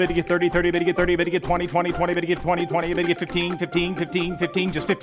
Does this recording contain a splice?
no; 0 cuts

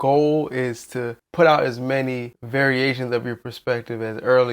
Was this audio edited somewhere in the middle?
yes; 2 cuts; at 1.2 s, 2.3 s

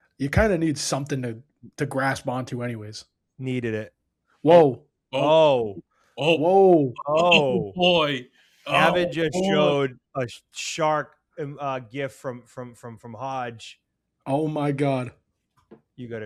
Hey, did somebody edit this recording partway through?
no; 0 cuts

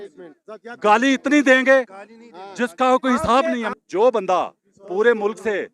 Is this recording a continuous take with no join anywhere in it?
no; 1 cut; at 3.7 s

